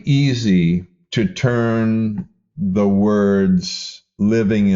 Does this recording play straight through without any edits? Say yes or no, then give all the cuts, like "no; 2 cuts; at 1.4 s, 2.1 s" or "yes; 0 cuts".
no; 1 cut; at 1.0 s